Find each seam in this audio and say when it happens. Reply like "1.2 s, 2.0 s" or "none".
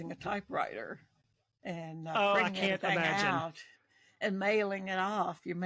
none